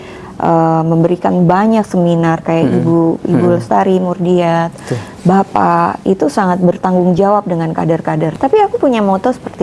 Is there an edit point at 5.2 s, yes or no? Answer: no